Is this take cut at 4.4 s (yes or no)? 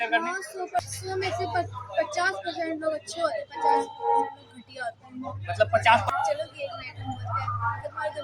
no